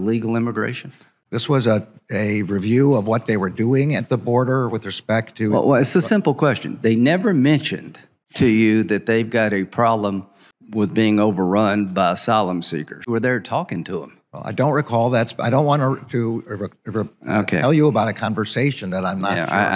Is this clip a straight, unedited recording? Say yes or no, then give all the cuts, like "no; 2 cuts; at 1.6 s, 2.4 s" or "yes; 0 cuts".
no; 1 cut; at 13.1 s